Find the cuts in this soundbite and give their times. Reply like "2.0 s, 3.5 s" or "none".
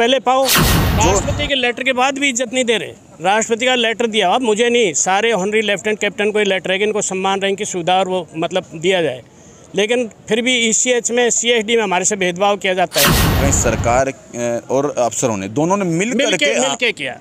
0.9 s, 13.4 s